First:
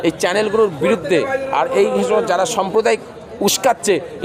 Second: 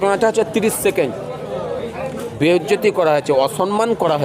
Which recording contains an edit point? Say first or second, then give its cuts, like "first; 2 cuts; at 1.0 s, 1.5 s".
second; 1 cut; at 2.2 s